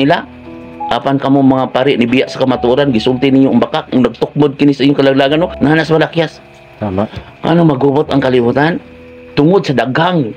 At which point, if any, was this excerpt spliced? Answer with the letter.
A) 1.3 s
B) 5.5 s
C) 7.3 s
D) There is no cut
B